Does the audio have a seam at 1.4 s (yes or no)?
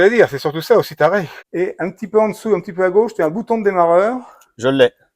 yes